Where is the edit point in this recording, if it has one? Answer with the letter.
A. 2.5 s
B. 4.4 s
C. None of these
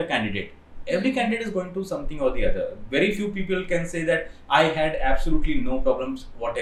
C